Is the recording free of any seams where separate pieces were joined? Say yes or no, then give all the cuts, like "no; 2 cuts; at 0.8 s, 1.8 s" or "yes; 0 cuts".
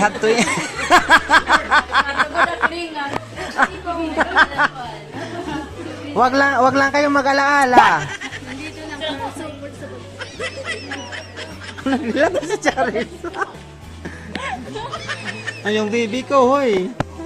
yes; 0 cuts